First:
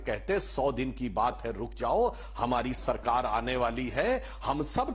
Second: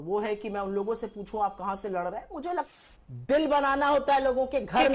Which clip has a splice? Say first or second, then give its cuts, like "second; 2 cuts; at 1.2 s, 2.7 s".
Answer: second; 1 cut; at 2.7 s